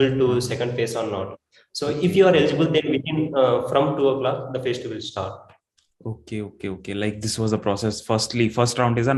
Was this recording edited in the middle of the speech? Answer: no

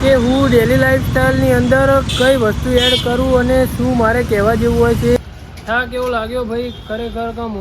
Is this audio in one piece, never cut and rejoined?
no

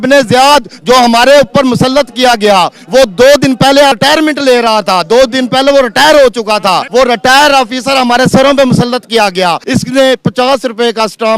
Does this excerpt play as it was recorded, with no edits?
no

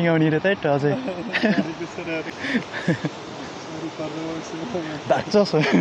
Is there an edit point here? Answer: yes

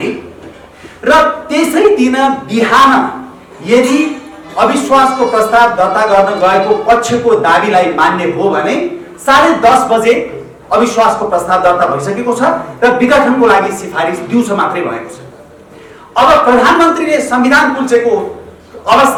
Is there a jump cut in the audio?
no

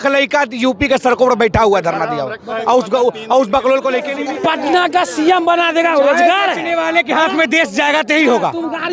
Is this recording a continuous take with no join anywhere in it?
no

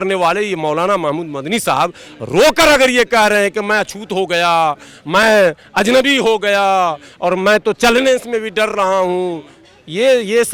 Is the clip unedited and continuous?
yes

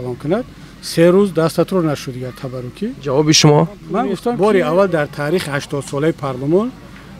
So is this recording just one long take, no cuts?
no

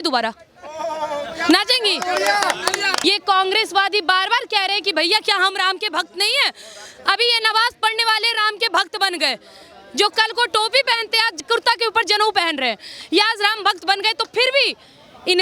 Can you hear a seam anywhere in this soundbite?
yes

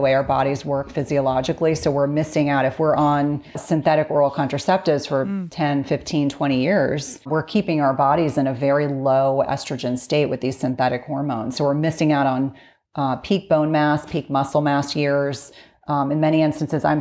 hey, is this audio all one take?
no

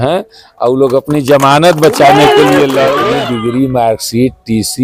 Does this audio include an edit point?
yes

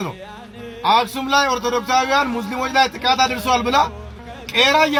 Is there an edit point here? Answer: no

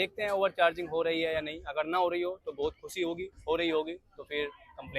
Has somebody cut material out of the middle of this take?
no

